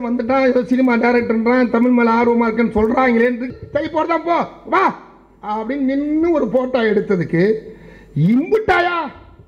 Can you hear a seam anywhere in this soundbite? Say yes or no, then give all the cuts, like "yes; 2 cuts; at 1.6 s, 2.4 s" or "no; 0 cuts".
yes; 1 cut; at 3.5 s